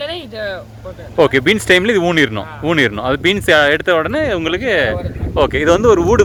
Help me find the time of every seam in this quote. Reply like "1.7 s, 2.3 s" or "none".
none